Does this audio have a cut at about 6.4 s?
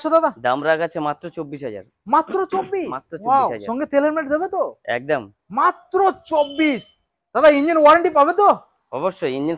no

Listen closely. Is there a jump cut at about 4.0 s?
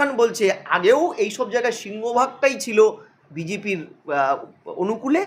no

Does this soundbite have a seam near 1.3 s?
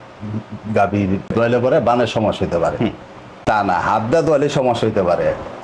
yes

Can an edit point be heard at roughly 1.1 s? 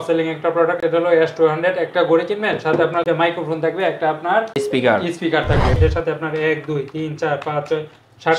no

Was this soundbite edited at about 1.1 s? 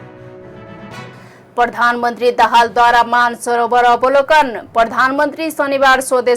yes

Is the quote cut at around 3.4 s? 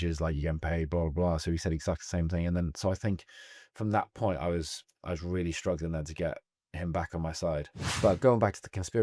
no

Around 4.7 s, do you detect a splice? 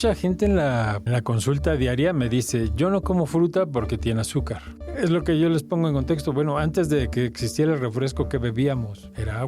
yes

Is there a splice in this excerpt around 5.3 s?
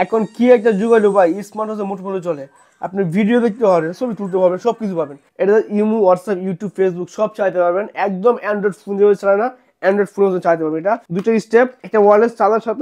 yes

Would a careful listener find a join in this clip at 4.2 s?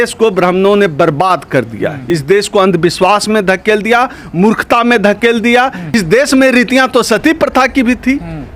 no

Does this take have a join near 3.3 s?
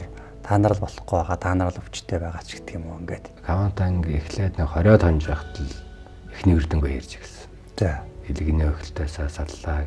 yes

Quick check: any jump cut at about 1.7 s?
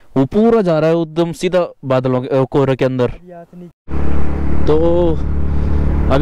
no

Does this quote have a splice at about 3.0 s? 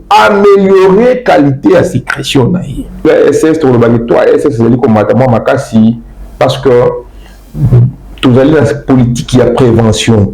yes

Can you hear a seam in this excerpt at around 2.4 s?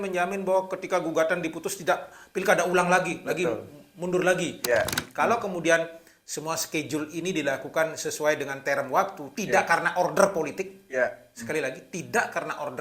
no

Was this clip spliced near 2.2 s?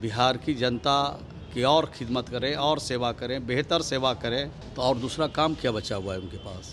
no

